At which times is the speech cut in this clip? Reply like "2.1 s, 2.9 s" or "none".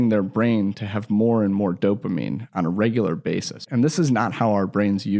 3.7 s